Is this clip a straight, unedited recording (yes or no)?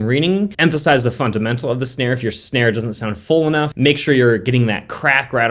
yes